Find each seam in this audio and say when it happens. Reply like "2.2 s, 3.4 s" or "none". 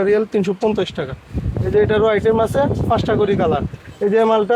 none